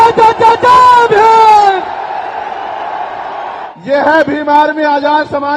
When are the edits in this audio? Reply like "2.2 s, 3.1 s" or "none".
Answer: 3.7 s